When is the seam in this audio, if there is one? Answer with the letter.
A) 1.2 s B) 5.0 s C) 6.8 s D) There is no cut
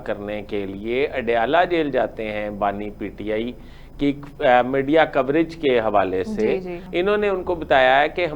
C